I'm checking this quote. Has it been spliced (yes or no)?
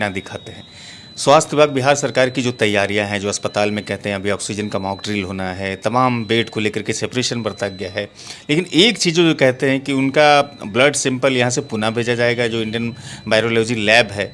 no